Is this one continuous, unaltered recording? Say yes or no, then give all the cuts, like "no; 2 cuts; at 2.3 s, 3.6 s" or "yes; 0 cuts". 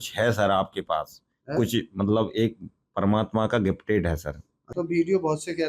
no; 1 cut; at 4.7 s